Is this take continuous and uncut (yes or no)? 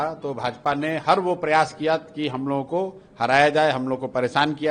yes